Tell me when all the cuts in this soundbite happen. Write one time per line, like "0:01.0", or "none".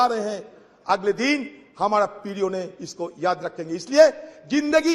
none